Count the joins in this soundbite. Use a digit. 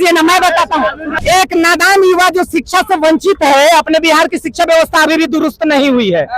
1